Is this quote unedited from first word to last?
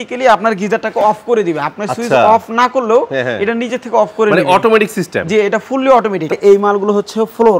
no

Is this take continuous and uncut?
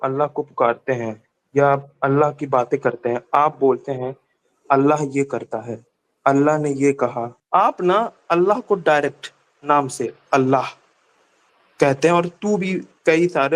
no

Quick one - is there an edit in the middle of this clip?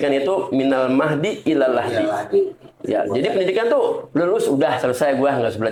no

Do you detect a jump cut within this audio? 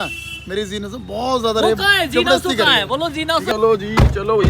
yes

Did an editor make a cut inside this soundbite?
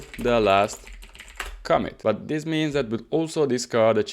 yes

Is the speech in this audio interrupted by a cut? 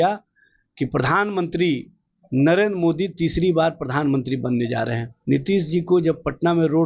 yes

